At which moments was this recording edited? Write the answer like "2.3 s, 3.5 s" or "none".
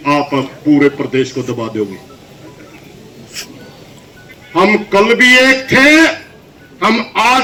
none